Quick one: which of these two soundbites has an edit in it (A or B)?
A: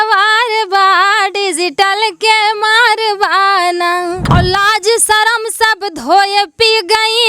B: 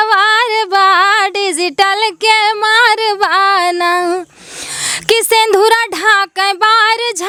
A